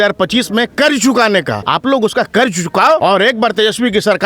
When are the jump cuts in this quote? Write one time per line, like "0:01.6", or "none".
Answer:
0:01.6
0:03.0